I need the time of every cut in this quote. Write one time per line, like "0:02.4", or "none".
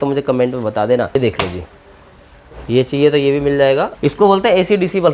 0:01.2
0:03.9